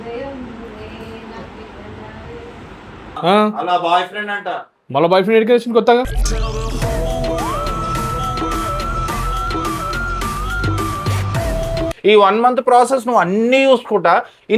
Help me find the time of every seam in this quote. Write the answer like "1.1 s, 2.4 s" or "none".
11.9 s